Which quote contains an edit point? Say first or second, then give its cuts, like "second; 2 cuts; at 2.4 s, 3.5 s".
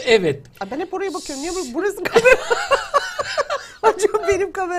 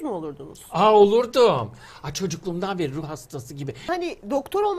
second; 1 cut; at 3.9 s